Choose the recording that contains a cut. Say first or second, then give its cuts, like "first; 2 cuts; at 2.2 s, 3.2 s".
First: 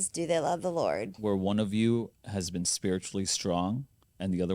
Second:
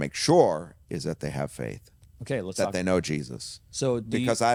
first; 1 cut; at 1.1 s